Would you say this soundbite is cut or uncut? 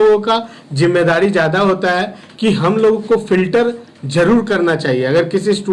uncut